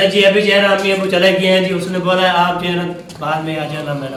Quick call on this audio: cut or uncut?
uncut